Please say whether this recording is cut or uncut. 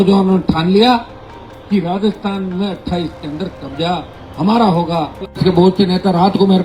cut